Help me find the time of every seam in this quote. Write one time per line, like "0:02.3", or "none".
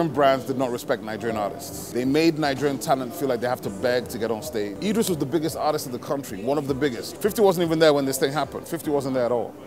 0:01.7
0:04.7
0:07.1